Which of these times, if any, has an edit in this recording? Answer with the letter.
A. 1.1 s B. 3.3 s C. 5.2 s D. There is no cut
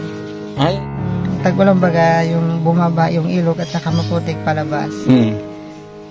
A